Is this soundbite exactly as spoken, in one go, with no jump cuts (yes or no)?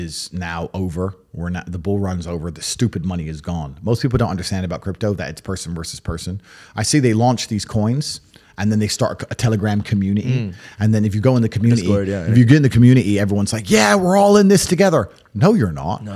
yes